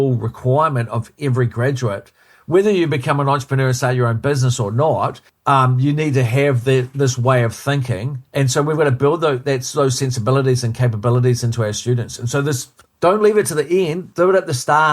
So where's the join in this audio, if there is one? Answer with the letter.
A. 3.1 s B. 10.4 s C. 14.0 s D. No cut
C